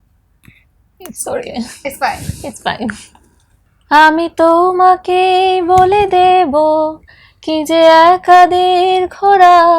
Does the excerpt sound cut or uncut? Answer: cut